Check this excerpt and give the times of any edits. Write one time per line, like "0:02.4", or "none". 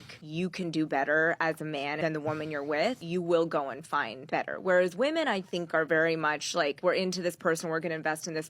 0:07.5